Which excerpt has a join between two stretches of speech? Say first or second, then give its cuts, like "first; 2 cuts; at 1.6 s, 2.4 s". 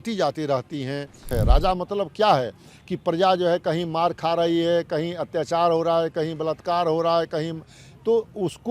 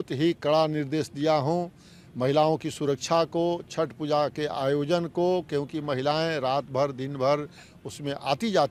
first; 1 cut; at 1.3 s